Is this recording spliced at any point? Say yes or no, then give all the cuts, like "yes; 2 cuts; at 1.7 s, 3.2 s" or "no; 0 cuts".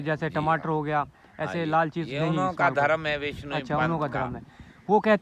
no; 0 cuts